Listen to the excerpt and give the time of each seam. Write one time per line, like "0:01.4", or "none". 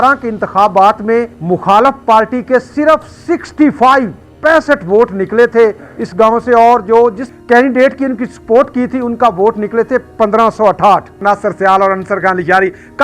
0:01.4
0:04.2
0:07.3
0:11.2